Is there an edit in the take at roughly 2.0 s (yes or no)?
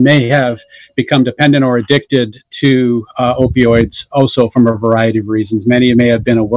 no